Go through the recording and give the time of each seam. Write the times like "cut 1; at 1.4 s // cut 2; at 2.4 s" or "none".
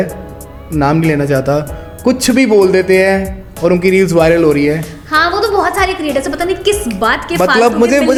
none

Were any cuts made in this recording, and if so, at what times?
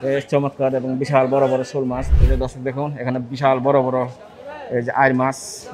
cut 1; at 2.1 s

